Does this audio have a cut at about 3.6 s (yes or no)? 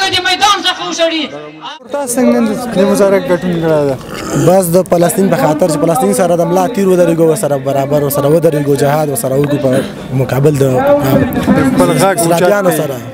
no